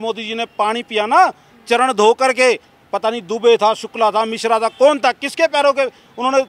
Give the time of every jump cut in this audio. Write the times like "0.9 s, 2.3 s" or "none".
none